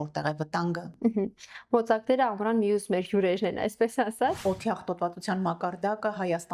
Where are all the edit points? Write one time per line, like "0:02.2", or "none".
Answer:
0:04.4